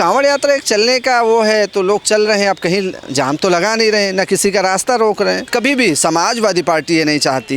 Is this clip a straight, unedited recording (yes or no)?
no